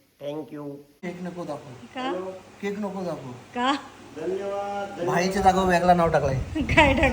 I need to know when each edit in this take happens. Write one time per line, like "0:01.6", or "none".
0:01.0